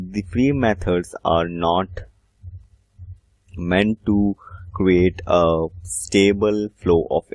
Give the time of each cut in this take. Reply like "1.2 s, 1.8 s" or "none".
none